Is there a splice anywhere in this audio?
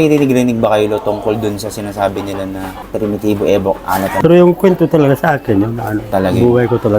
yes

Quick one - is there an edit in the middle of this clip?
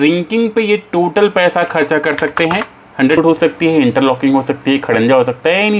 yes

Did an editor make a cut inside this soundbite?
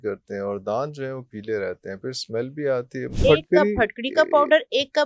yes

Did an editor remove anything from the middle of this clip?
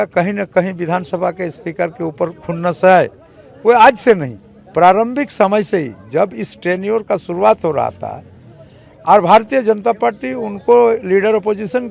no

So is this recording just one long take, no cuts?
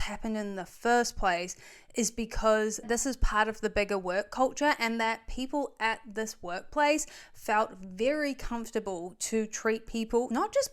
yes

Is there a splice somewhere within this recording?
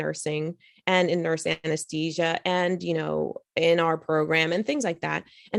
no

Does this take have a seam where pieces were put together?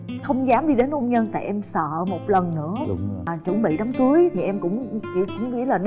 yes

